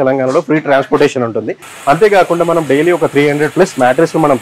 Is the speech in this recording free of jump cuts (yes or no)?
yes